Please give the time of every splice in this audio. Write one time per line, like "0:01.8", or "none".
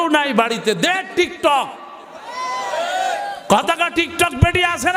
none